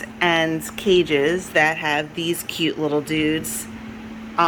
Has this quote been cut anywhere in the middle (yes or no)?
no